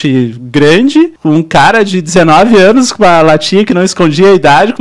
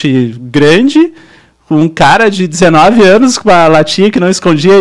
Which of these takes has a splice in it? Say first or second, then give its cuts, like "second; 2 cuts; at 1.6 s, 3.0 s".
first; 1 cut; at 1.2 s